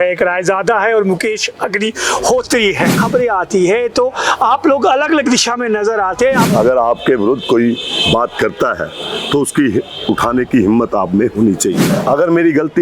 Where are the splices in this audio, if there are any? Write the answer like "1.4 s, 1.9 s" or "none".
3.0 s, 6.4 s, 11.9 s